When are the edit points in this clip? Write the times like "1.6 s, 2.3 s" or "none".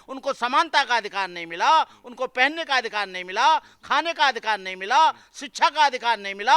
none